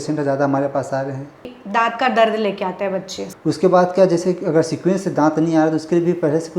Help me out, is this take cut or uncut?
cut